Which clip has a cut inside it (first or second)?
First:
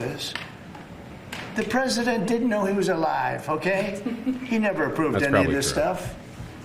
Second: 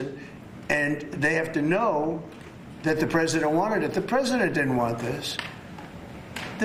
first